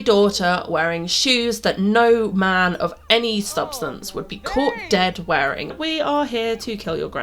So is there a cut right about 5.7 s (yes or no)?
yes